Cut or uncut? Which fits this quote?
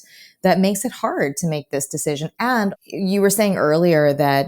cut